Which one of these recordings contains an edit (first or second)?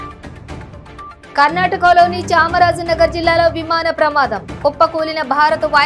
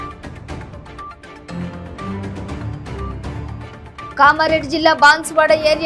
second